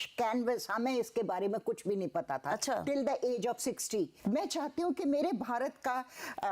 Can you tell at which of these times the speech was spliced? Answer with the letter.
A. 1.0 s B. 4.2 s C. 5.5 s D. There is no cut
B